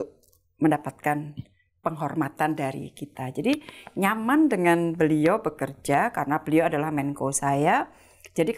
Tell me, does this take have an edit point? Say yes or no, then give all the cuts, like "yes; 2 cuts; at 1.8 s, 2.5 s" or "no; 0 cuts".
no; 0 cuts